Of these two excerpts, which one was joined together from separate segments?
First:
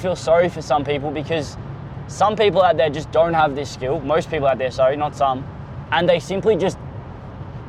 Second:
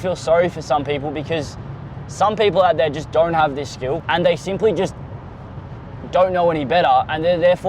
second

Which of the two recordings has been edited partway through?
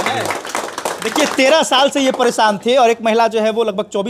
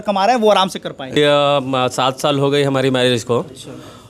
second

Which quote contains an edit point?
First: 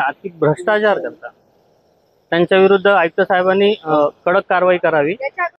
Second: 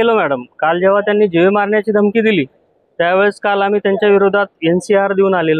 first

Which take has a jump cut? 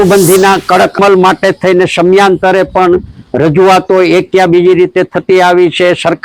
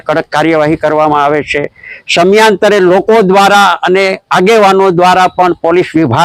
first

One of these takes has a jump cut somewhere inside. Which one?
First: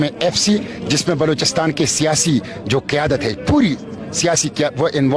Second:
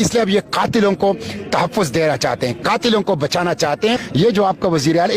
second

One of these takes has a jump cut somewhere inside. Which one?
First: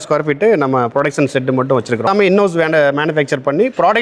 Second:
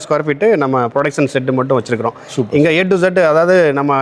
first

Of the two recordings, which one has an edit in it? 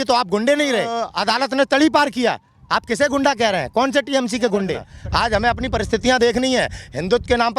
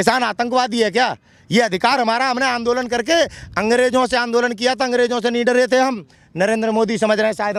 first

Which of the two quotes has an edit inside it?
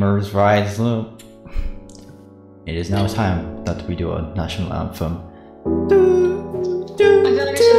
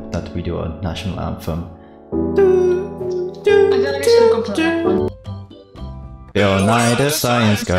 second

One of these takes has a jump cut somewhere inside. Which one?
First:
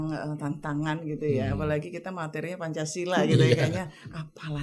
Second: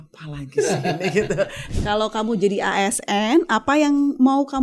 second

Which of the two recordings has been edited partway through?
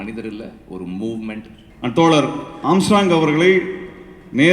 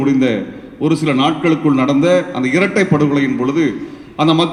first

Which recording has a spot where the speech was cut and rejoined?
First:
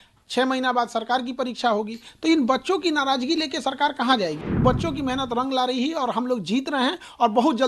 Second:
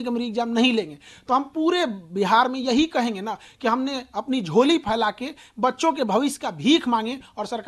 first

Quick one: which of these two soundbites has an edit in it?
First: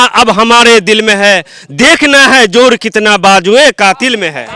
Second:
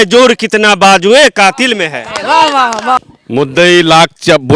second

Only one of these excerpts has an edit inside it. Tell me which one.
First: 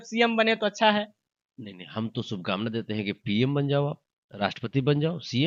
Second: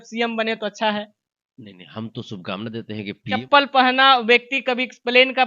second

